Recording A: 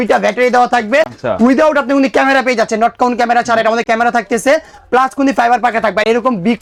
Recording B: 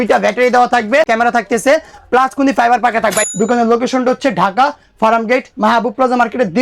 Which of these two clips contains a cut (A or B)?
B